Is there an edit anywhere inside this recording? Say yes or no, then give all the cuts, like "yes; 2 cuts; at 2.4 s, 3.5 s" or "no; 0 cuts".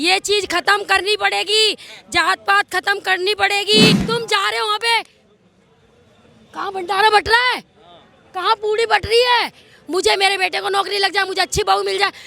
yes; 1 cut; at 4.0 s